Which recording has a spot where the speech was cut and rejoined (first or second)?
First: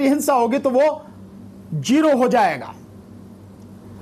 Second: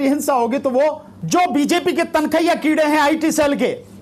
second